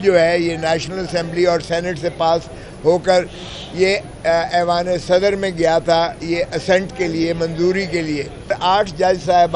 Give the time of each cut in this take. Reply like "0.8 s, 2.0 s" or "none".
8.5 s